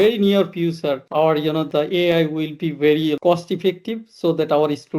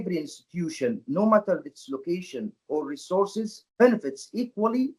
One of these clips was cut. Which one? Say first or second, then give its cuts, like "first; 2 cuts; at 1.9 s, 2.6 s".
first; 1 cut; at 1.0 s